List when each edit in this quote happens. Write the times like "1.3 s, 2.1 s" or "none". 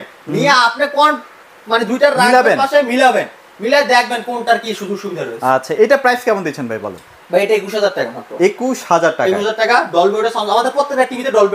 none